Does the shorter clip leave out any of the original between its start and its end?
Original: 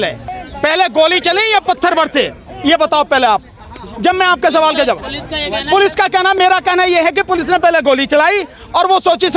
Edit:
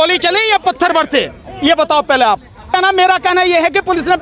yes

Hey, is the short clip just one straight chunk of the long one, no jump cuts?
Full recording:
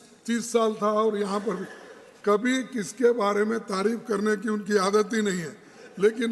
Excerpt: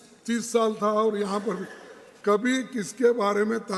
yes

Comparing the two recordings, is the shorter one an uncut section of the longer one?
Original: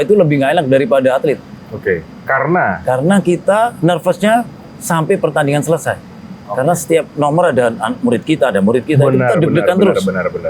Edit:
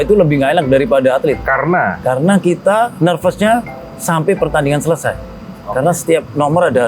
no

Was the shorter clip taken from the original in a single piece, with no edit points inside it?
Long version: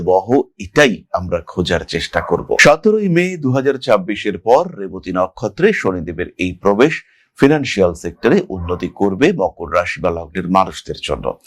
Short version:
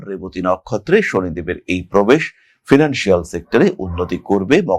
yes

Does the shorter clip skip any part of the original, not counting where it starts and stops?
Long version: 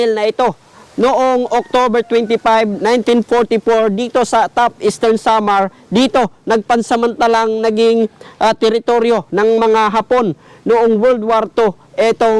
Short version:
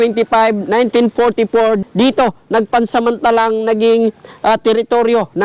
yes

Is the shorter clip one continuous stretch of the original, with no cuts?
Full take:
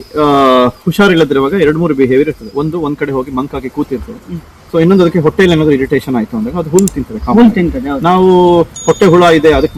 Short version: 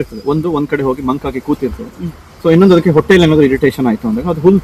yes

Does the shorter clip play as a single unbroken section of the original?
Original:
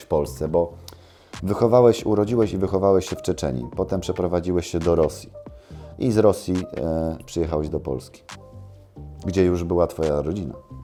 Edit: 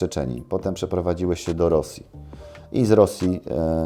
yes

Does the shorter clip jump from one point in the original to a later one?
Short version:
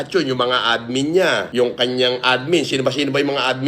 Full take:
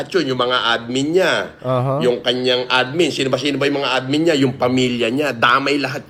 yes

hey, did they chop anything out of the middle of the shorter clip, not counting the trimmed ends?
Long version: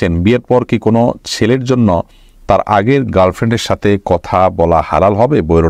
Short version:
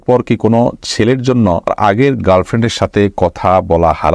yes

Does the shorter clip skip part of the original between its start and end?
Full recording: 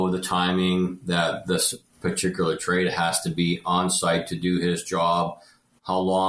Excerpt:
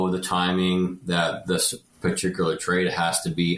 no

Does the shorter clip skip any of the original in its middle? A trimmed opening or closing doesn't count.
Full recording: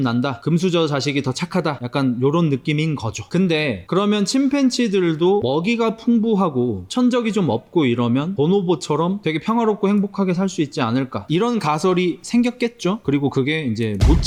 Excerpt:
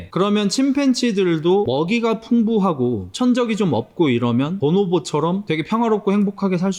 no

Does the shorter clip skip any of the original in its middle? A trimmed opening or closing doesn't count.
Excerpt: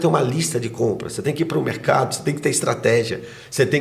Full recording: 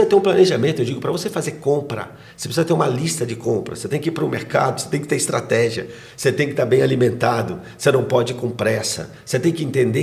no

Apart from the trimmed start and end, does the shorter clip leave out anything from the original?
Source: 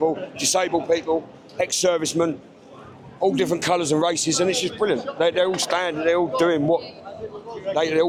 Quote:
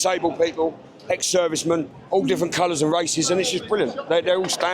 yes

